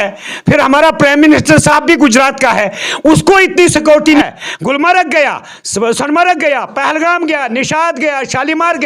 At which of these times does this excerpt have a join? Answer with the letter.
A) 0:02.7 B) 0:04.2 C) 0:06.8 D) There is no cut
B